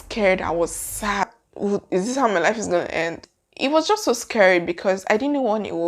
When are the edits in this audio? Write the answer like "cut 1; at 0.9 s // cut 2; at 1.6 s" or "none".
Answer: cut 1; at 1.2 s // cut 2; at 3.2 s